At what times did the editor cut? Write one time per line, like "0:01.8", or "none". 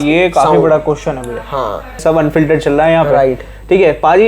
0:02.0